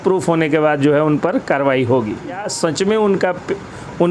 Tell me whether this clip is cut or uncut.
cut